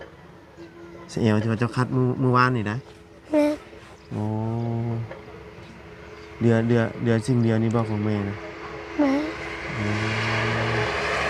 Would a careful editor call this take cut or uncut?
uncut